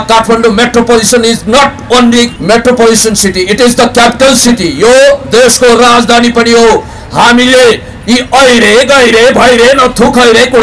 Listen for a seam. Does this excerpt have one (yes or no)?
yes